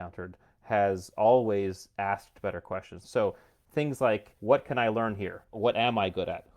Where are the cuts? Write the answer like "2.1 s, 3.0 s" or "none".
3.0 s, 4.3 s, 5.5 s